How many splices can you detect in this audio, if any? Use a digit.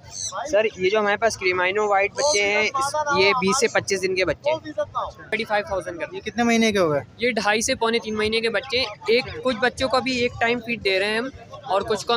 1